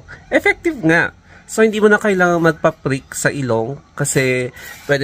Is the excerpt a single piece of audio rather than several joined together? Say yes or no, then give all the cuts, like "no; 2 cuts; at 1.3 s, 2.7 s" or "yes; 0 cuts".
yes; 0 cuts